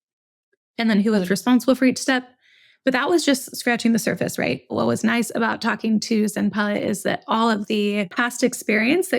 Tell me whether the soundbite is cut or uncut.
cut